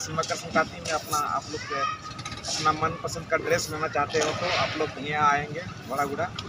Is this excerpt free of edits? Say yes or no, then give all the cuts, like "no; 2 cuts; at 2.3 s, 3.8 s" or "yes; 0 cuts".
yes; 0 cuts